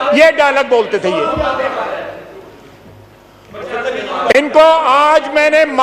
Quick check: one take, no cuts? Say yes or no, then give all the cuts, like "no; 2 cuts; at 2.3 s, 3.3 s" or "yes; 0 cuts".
yes; 0 cuts